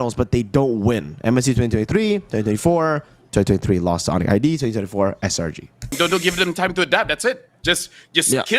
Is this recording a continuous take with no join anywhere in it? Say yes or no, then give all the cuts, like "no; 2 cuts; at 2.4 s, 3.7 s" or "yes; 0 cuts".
no; 2 cuts; at 3.1 s, 5.9 s